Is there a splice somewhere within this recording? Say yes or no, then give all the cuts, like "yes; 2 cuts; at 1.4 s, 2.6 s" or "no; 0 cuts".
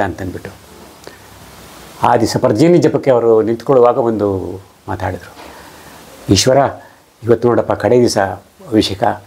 no; 0 cuts